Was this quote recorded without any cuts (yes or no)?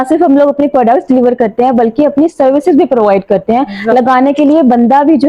yes